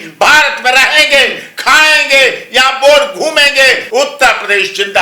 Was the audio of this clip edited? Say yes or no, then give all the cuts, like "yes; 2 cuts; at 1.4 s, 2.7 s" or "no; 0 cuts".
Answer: yes; 1 cut; at 3.8 s